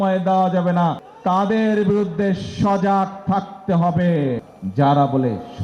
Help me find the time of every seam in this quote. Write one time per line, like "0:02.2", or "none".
0:01.1
0:04.5